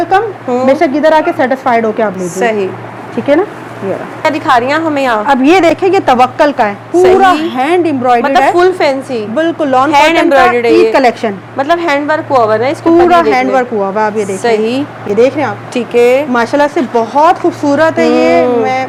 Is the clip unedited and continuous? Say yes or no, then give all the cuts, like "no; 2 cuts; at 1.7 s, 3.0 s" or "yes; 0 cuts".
yes; 0 cuts